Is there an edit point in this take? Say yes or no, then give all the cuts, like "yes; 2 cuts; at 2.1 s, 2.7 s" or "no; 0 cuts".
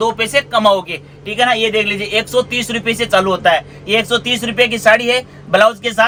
no; 0 cuts